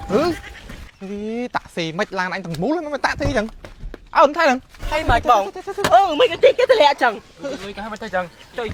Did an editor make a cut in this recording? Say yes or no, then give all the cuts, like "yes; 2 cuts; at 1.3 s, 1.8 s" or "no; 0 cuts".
no; 0 cuts